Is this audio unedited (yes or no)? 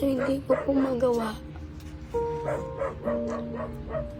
yes